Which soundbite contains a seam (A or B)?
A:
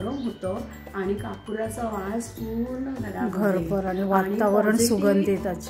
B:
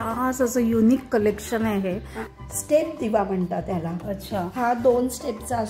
B